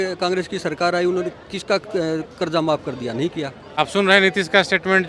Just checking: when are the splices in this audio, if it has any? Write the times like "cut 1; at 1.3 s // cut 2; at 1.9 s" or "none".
cut 1; at 3.6 s